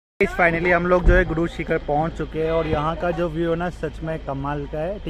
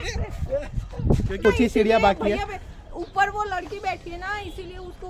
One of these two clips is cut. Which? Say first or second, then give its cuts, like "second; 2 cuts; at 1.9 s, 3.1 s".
second; 1 cut; at 1.4 s